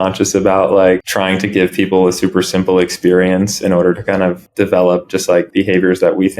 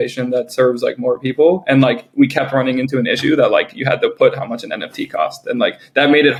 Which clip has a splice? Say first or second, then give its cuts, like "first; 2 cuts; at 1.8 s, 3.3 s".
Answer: first; 3 cuts; at 1.1 s, 4.4 s, 5.5 s